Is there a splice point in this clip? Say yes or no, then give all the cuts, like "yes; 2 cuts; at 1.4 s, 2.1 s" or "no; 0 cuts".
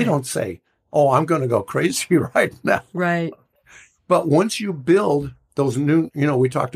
no; 0 cuts